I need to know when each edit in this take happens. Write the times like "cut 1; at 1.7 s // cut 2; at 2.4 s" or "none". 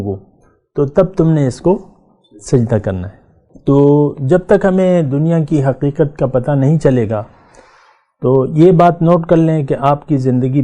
none